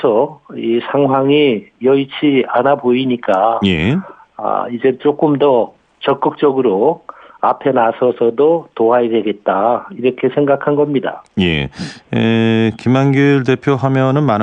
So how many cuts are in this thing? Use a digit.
1